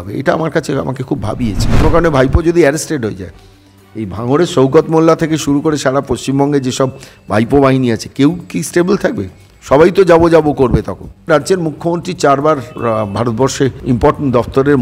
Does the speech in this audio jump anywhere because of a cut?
yes; 4 cuts; at 1.7 s, 11.3 s, 12.7 s, 13.8 s

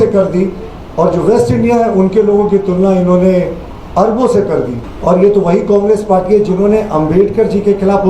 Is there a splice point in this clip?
yes; 1 cut; at 4.8 s

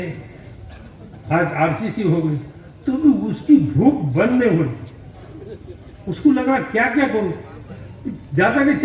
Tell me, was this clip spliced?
no; 0 cuts

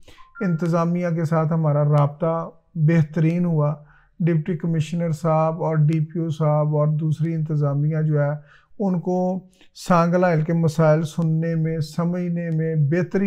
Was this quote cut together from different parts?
no; 0 cuts

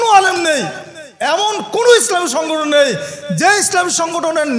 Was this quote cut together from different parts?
no; 0 cuts

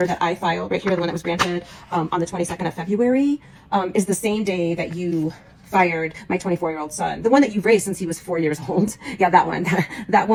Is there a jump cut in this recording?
no; 0 cuts

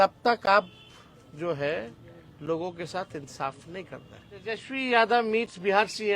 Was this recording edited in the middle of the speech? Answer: yes; 1 cut; at 4.6 s

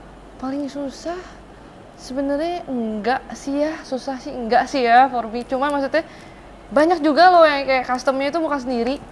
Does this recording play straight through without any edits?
yes; 0 cuts

